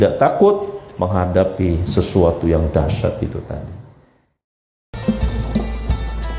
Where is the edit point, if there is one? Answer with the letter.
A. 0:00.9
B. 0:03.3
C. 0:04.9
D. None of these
C